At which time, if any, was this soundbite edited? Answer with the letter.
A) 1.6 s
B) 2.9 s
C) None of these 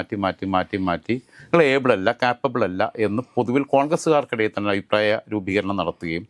C